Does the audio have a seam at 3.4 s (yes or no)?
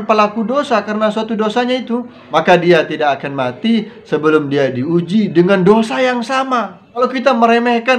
no